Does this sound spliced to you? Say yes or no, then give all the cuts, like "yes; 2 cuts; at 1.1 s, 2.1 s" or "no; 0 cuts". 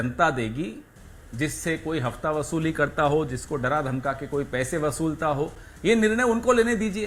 no; 0 cuts